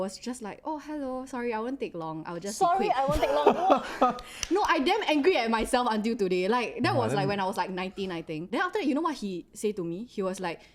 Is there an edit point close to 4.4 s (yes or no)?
no